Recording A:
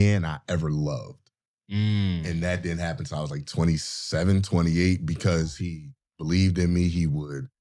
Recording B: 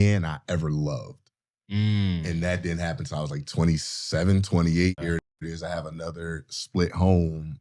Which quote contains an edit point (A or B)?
B